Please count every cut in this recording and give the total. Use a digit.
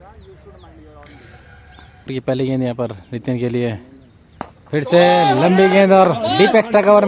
1